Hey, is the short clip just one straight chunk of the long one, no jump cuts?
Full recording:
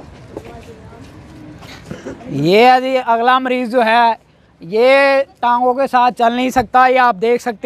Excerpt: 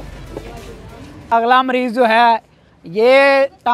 no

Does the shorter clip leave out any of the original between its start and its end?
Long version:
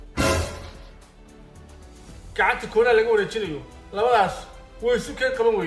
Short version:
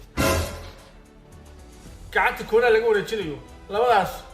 yes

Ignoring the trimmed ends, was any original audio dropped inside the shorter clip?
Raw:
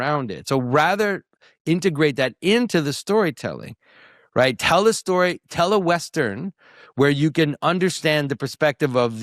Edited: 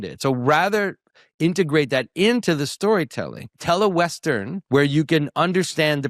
yes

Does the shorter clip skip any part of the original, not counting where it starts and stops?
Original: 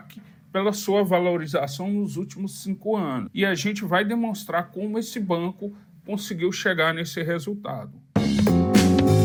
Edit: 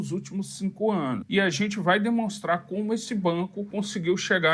yes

